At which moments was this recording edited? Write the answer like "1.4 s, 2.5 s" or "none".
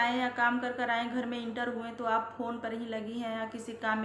none